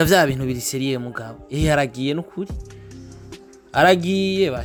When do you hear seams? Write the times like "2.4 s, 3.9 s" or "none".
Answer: none